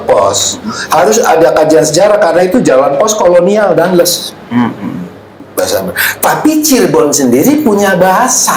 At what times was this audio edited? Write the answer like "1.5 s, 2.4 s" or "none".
5.4 s